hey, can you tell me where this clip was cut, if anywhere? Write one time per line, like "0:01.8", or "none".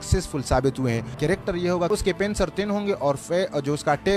0:01.1
0:01.9